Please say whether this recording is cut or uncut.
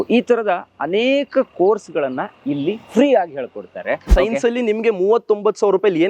cut